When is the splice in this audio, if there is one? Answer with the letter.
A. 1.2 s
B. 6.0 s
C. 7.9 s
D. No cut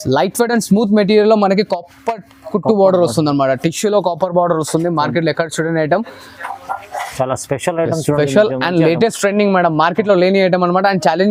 D